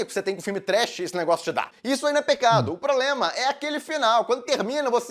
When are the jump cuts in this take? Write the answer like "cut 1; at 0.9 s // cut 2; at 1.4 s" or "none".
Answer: cut 1; at 1.7 s